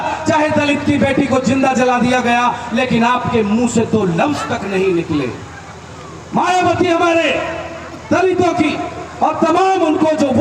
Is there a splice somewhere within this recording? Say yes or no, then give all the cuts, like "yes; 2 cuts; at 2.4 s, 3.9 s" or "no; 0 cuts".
no; 0 cuts